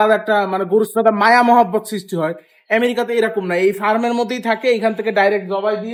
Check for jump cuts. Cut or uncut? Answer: uncut